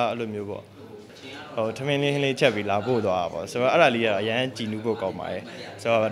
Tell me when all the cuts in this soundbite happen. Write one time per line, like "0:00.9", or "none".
0:01.0